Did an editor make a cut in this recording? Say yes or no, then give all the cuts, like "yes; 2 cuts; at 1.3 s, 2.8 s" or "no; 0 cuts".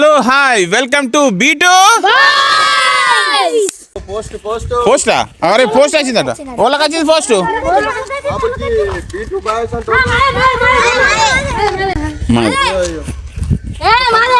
yes; 1 cut; at 4.0 s